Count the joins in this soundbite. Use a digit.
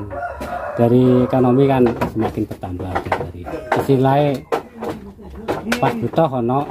1